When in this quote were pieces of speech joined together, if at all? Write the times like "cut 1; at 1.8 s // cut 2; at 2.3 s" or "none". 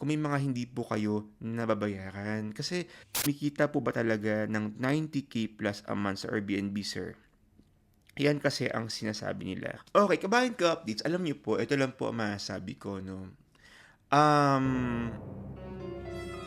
cut 1; at 3.3 s // cut 2; at 9.8 s // cut 3; at 15.1 s

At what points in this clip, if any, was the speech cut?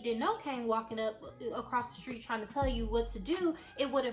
none

